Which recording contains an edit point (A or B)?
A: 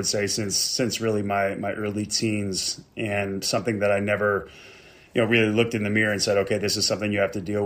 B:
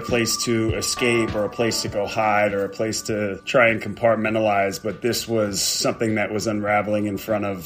B